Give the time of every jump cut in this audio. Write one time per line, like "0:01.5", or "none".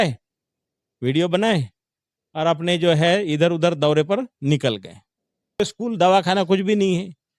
0:05.6

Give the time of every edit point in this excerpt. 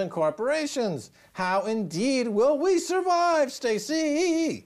0:01.2

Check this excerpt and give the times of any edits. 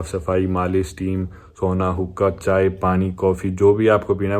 none

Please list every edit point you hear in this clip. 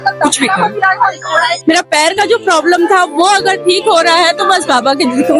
0:01.6

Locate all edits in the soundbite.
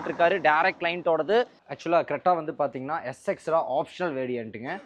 0:01.6

